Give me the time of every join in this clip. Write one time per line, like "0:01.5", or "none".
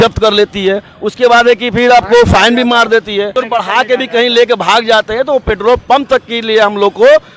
0:03.4